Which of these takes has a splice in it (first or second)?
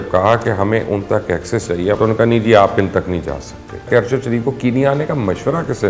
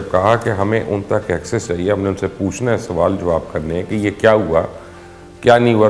first